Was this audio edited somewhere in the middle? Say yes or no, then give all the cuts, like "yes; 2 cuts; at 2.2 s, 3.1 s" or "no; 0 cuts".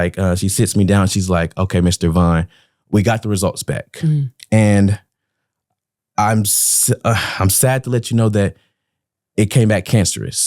no; 0 cuts